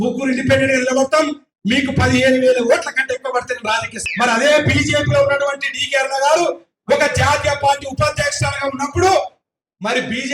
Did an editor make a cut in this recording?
yes; 1 cut; at 4.0 s

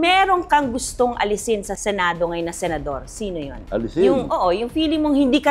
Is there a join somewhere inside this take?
yes; 1 cut; at 1.8 s

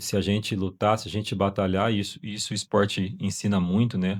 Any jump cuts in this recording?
no; 0 cuts

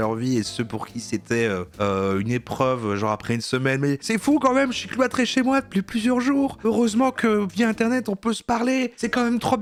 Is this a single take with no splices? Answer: yes; 0 cuts

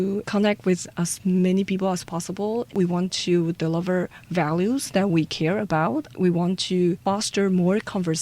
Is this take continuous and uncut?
no; 2 cuts; at 2.7 s, 7.0 s

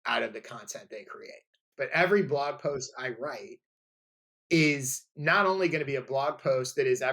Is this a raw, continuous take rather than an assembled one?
no; 1 cut; at 1.7 s

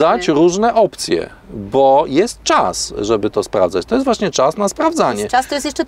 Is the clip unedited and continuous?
yes; 0 cuts

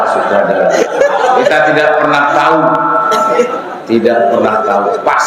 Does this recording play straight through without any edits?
yes; 0 cuts

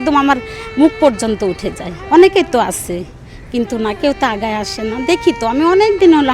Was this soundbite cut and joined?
yes; 1 cut; at 1.9 s

